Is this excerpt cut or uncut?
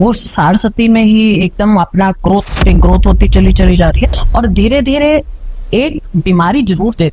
cut